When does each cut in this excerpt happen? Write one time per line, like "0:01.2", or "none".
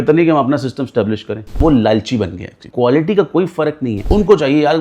0:01.6
0:02.7
0:04.0